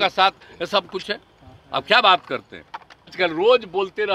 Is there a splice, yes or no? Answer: yes